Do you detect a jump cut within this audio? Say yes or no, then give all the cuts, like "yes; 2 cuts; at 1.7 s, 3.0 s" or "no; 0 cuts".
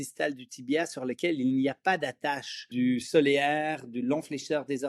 yes; 1 cut; at 2.7 s